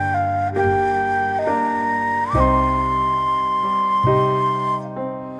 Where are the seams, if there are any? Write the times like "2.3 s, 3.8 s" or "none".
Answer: none